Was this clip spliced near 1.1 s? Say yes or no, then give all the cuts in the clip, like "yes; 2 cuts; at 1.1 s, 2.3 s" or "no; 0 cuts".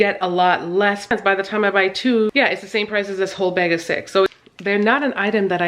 yes; 2 cuts; at 1.1 s, 4.3 s